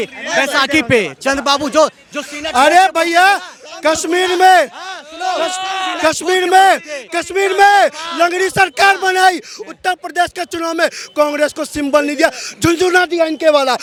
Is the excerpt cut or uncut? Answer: uncut